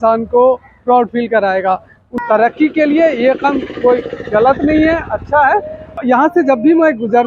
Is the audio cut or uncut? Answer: cut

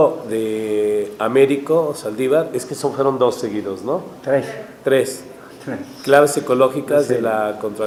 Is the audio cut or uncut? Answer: uncut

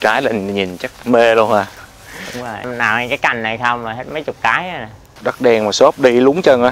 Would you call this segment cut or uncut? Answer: cut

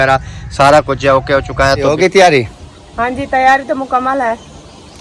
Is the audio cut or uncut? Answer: cut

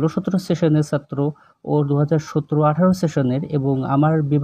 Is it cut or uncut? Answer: uncut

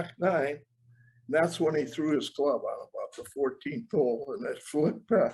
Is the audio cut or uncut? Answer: uncut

